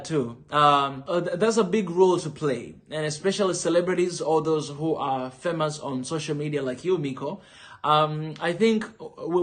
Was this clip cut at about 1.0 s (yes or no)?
yes